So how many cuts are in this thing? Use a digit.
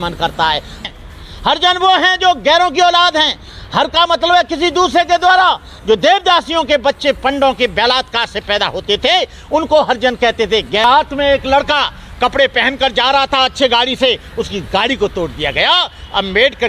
2